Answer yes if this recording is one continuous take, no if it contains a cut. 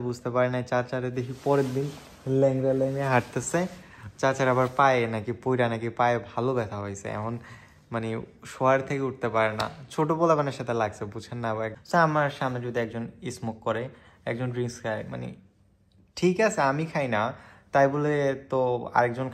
no